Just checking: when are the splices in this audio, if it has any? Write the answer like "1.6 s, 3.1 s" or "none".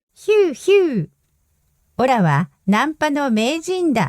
2.1 s